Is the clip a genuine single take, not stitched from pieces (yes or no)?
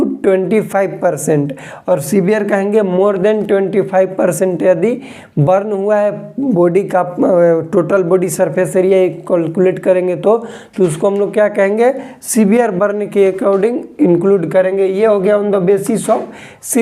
yes